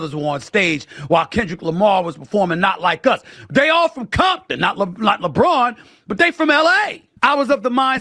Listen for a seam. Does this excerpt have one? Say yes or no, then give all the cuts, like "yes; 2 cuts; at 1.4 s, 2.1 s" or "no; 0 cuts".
yes; 1 cut; at 7.0 s